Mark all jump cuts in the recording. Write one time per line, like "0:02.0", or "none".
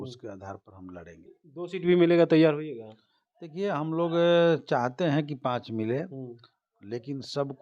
0:01.4